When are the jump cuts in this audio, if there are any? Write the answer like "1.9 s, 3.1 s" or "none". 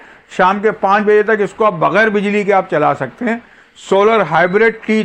none

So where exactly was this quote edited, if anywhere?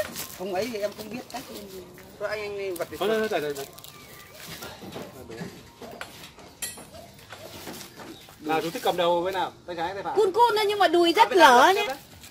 none

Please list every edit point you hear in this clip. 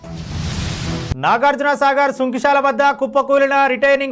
1.1 s

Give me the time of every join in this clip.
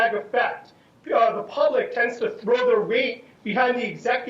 1.4 s

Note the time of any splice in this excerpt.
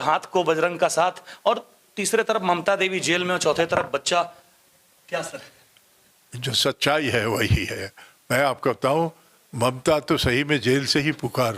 none

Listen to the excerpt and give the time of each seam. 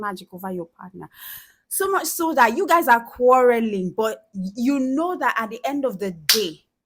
none

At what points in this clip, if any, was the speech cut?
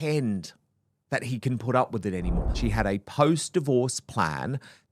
2.6 s

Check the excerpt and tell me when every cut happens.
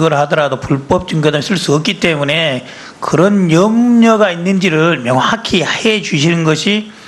3.6 s

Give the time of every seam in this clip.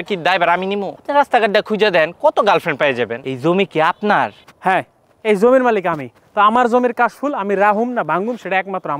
1.0 s

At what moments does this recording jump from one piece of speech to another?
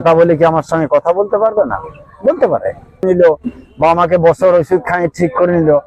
3.0 s

